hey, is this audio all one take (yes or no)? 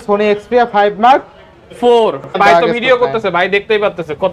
no